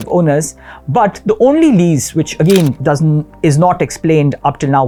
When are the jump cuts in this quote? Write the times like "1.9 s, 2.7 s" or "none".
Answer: none